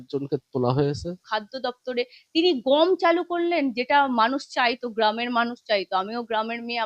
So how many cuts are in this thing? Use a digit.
1